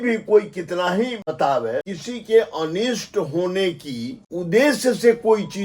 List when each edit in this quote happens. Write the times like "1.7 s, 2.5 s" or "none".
1.2 s, 1.9 s, 4.2 s